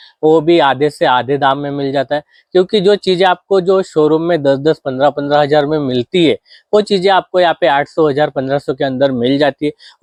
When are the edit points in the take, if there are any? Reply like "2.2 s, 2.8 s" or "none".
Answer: none